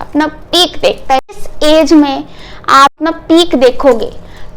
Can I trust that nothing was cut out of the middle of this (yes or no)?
no